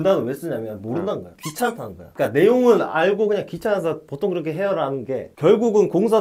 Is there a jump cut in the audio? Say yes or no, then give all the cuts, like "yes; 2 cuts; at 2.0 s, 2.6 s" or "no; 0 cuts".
no; 0 cuts